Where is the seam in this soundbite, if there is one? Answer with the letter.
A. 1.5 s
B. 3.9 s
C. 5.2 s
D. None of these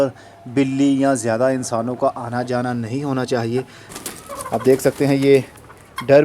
B